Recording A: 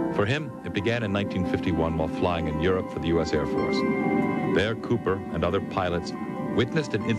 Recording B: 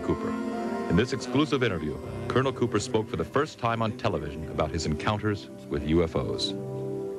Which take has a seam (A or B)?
B